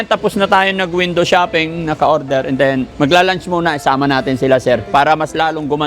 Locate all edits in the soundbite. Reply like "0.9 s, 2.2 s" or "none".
2.9 s